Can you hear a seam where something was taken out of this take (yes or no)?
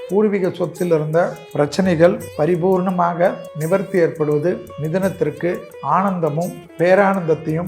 yes